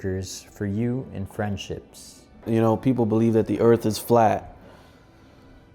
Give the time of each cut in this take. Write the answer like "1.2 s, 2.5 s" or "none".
2.4 s